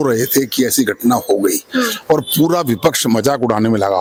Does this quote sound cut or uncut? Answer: uncut